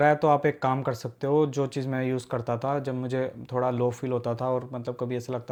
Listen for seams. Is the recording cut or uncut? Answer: uncut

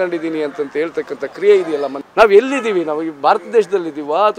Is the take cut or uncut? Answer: cut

